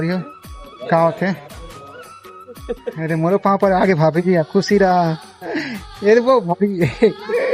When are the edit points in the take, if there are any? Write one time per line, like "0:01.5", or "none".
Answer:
none